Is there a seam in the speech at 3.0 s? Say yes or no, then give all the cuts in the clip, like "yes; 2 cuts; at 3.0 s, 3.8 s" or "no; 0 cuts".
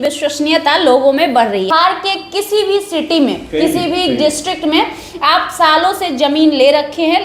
no; 1 cut; at 1.7 s